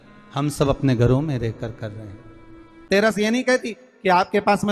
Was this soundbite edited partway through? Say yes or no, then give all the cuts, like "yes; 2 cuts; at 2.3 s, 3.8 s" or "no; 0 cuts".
yes; 1 cut; at 2.9 s